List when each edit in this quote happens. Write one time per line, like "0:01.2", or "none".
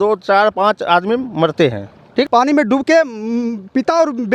0:02.2